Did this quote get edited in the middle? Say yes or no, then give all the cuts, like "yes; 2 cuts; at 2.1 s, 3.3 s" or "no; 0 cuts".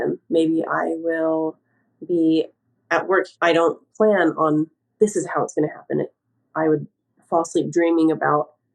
yes; 1 cut; at 3.3 s